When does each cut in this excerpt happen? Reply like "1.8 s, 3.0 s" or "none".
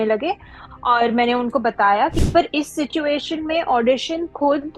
2.2 s